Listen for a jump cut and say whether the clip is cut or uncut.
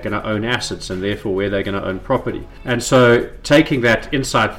cut